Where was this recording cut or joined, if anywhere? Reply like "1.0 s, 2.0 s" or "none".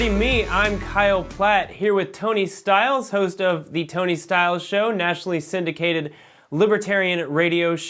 none